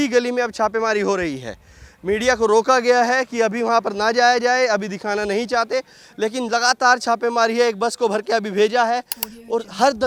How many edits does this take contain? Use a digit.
0